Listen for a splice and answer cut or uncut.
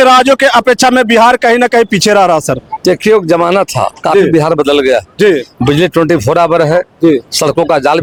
uncut